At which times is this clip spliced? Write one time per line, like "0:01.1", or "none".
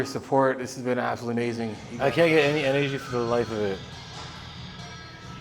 0:01.8